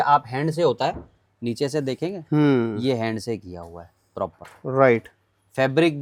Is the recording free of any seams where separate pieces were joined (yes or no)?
yes